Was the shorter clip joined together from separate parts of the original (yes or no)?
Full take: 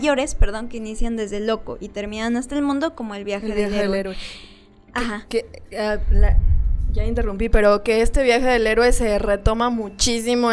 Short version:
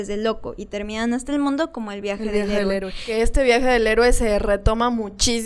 yes